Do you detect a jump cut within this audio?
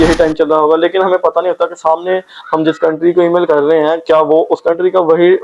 no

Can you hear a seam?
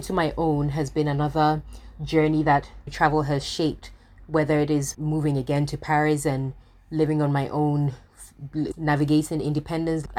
yes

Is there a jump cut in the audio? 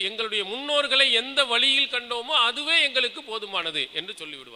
no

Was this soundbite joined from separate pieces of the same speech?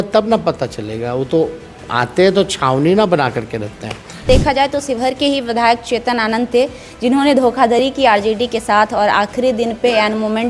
yes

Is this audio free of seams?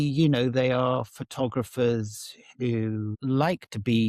no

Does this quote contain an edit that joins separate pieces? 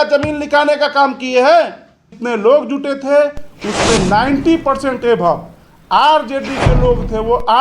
yes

